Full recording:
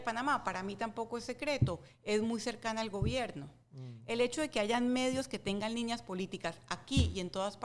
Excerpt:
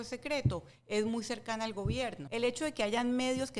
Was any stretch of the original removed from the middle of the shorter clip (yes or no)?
yes